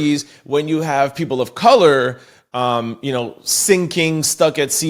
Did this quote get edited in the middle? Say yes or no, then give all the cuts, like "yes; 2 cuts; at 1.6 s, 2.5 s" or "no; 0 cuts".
no; 0 cuts